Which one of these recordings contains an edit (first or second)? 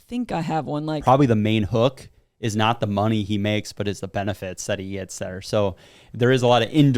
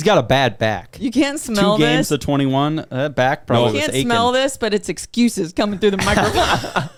first